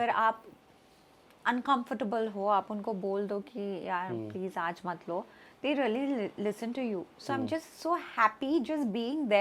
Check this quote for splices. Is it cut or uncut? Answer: uncut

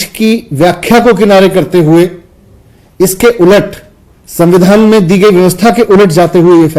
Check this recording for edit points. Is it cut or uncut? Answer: uncut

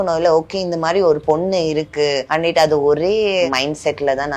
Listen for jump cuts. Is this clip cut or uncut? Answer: cut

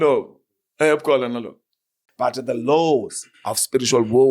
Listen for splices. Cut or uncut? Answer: cut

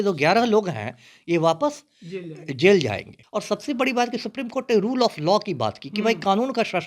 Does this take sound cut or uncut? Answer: cut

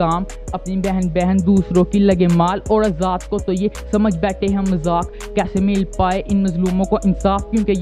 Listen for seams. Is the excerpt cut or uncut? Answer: uncut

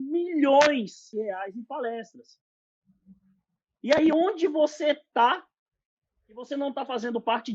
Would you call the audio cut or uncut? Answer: cut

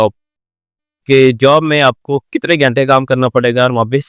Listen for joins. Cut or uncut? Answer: uncut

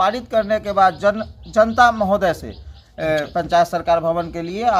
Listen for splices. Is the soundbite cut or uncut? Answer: cut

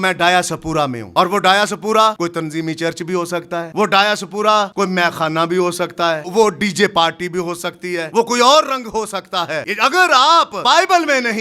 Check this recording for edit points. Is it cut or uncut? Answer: cut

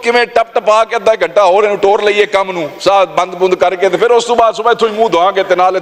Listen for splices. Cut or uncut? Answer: uncut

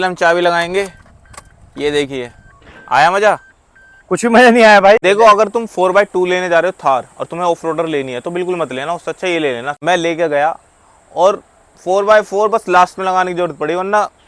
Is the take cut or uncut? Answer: cut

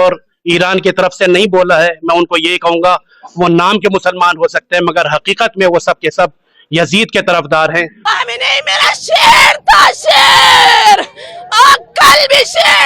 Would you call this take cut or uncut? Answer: cut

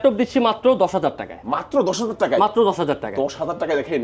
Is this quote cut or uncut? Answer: uncut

